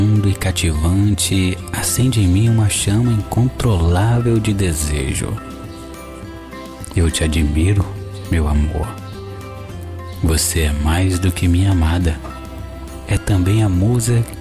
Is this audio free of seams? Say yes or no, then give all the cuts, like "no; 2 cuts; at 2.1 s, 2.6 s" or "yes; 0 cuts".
no; 2 cuts; at 5.4 s, 6.8 s